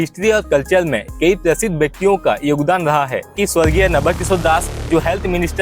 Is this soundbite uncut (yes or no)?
no